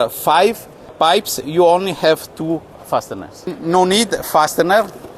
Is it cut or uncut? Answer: cut